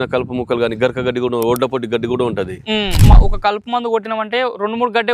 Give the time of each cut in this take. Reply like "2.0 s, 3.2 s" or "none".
3.1 s